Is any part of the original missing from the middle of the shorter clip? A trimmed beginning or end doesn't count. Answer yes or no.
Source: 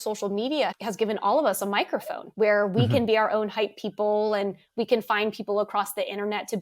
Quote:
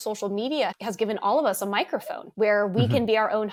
no